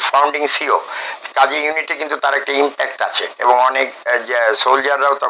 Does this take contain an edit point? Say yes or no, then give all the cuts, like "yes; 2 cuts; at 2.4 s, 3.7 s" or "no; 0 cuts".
no; 0 cuts